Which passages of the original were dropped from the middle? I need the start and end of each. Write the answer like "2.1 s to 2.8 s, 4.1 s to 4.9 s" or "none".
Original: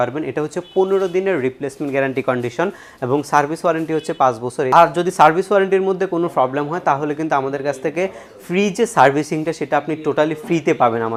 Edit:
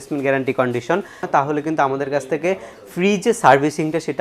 2.9 s to 6.7 s